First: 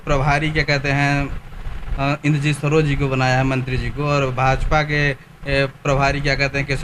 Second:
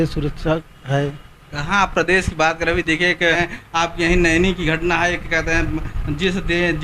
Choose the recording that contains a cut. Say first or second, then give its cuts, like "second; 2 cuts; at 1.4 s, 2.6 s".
second; 1 cut; at 3.3 s